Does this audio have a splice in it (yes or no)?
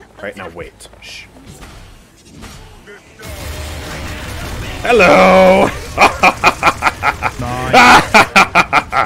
yes